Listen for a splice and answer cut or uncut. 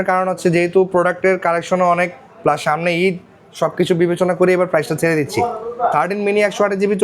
uncut